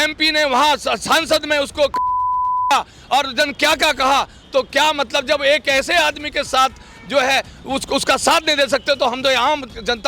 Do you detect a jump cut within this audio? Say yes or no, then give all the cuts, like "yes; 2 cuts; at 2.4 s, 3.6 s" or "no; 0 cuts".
no; 0 cuts